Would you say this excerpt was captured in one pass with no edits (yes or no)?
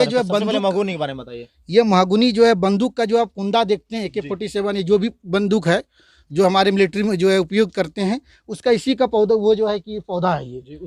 yes